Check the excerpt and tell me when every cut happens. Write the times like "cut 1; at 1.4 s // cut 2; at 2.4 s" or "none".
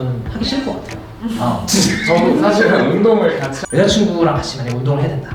cut 1; at 3.5 s